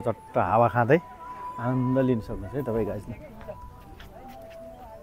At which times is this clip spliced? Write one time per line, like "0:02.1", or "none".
none